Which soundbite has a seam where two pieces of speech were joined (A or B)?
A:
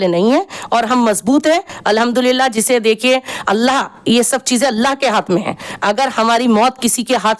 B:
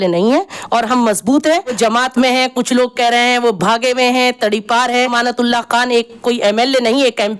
B